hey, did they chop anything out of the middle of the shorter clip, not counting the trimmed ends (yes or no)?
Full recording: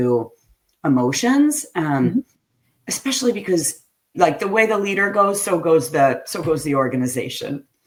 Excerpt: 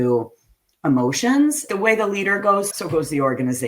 yes